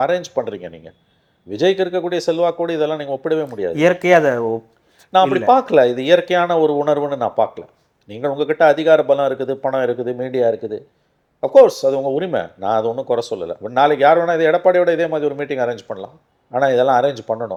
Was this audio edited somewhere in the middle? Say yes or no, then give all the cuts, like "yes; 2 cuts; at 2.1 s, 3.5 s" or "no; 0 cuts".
no; 0 cuts